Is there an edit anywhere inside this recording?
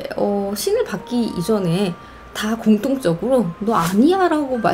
no; 0 cuts

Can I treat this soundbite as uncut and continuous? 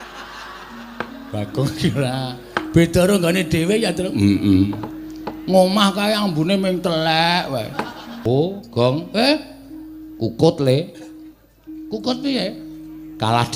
no; 1 cut; at 8.1 s

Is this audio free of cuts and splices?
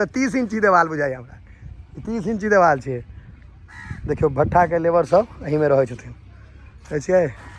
yes; 0 cuts

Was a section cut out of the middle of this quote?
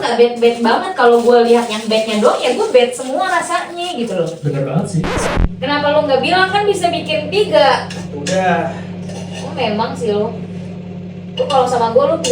yes; 1 cut; at 5.1 s

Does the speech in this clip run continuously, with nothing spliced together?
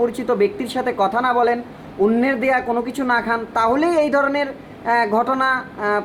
yes; 0 cuts

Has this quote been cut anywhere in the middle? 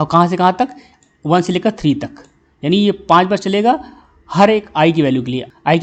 no; 0 cuts

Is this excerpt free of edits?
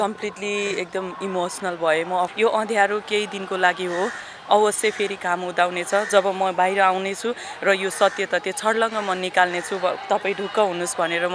no; 1 cut; at 2.3 s

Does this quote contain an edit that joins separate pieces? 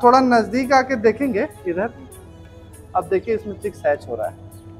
no; 0 cuts

